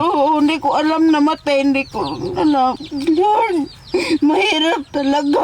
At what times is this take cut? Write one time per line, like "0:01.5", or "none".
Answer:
0:02.8